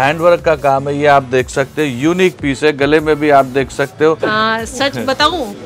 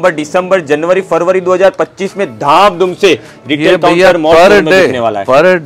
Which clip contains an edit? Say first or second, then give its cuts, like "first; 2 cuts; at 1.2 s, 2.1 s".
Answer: first; 1 cut; at 4.2 s